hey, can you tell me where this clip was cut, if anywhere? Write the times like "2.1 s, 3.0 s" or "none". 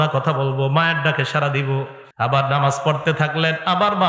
2.0 s